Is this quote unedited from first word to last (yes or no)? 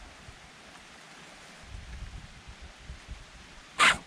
no